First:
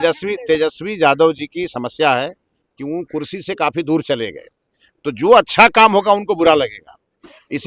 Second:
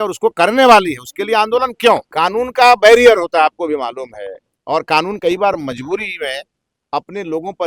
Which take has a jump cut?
second; 1 cut; at 2.1 s

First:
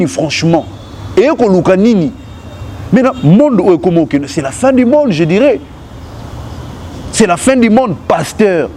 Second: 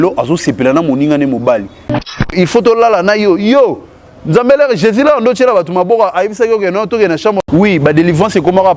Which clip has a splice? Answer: second; 1 cut; at 2.3 s

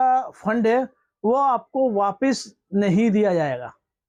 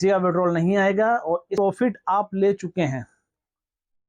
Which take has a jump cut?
second; 1 cut; at 1.5 s

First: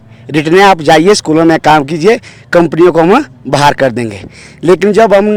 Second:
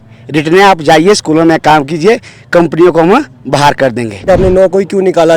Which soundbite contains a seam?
second; 1 cut; at 4.2 s

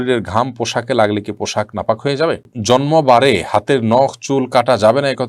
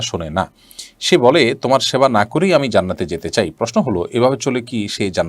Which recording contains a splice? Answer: first; 1 cut; at 2.5 s

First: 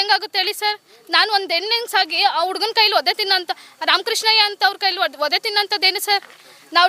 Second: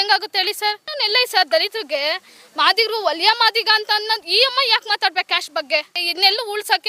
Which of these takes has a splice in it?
second; 2 cuts; at 1.0 s, 6.0 s

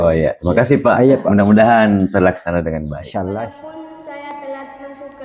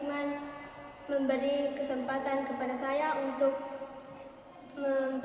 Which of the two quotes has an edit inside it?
first; 1 cut; at 3.6 s

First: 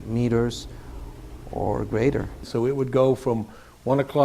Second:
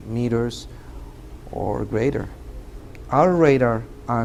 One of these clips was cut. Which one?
first; 1 cut; at 2.4 s

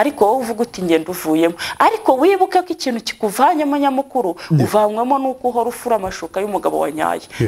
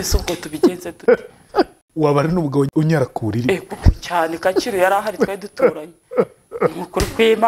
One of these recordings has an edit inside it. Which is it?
second; 2 cuts; at 1.8 s, 2.7 s

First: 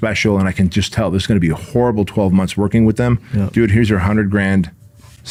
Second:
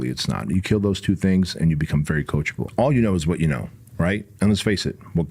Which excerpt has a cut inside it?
second; 1 cut; at 2.7 s

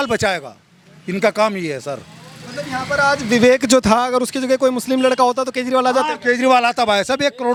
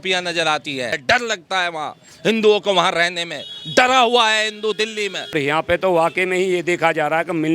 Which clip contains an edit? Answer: second; 2 cuts; at 1.0 s, 5.4 s

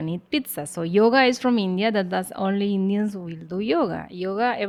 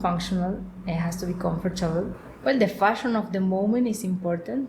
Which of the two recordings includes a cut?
second; 1 cut; at 2.2 s

